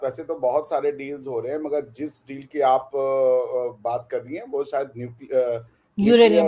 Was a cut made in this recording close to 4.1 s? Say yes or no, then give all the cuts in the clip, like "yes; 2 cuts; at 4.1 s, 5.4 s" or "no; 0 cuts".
no; 0 cuts